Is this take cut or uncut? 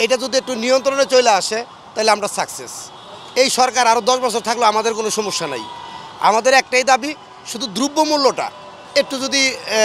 uncut